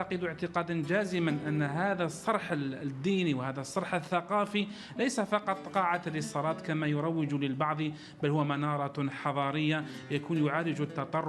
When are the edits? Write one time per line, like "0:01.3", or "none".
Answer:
0:01.1